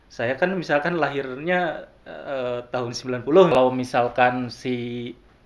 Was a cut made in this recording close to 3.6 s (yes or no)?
yes